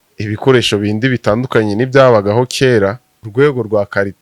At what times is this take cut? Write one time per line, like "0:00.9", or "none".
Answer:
0:03.2